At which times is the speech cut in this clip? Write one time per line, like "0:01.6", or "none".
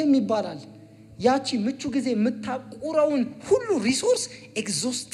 none